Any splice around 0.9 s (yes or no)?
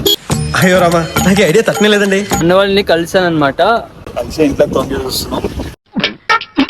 no